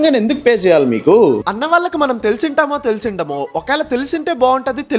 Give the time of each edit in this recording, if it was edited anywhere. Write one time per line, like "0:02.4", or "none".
0:01.4

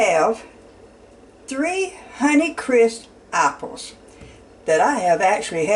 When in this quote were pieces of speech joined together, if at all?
none

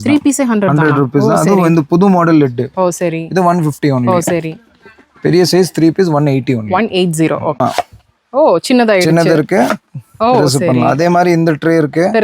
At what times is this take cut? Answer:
0:07.6

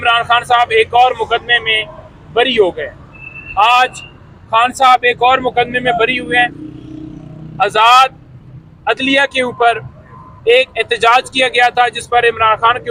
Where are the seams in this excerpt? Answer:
none

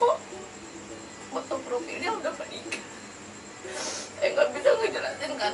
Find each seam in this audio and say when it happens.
0:03.6

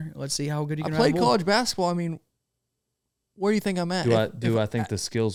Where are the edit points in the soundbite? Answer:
none

